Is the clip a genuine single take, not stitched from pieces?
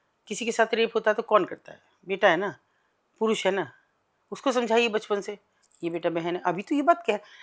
yes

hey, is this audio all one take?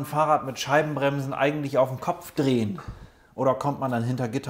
yes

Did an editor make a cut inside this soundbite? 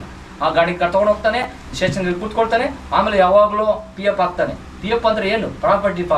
no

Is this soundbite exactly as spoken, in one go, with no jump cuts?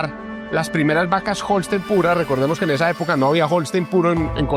yes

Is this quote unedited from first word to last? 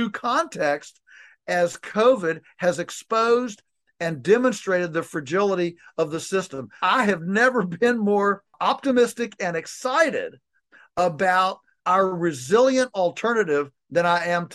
no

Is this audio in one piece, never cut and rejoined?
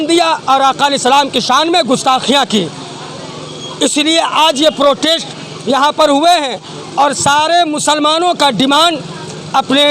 yes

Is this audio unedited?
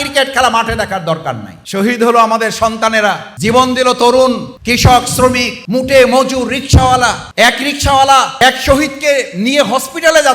no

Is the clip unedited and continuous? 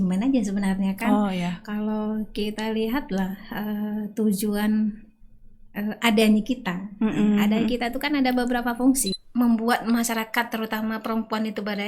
no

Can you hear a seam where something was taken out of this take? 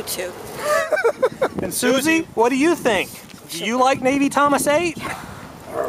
yes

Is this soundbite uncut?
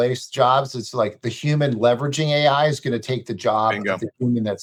yes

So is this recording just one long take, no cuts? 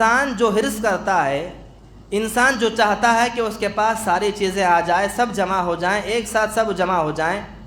yes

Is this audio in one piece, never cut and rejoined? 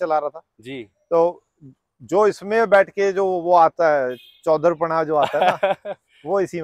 yes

